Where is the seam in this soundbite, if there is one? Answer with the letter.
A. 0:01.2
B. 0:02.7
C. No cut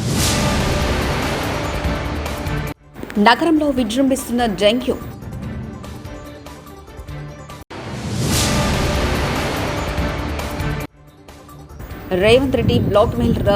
B